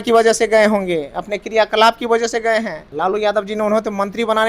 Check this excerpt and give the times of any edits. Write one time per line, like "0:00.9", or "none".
0:02.8